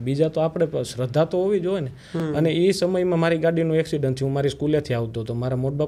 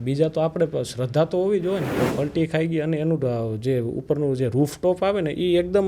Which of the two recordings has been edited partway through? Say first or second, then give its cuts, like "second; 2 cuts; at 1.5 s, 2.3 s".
second; 1 cut; at 1.9 s